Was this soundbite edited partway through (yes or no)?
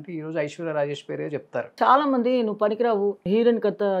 yes